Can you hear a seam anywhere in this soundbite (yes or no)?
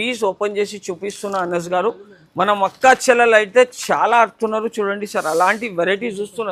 no